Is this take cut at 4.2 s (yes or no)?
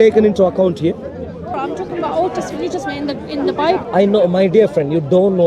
no